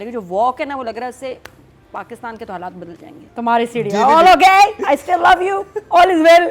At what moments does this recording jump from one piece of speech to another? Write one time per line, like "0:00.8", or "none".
0:03.2

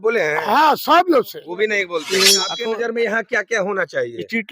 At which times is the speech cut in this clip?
0:02.5

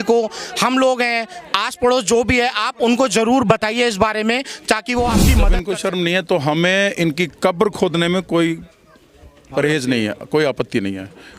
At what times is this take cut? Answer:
0:05.5

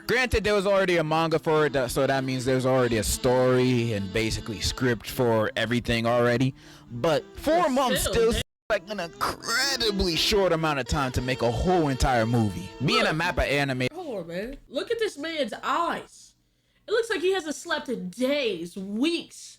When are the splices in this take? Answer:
0:14.6

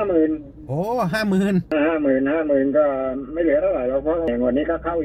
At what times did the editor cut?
0:01.7
0:04.3

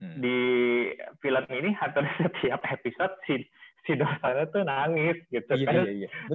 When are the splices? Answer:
none

